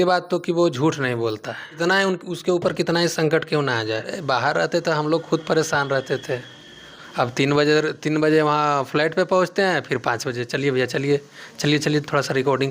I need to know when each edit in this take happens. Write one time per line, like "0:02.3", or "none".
0:01.7
0:04.1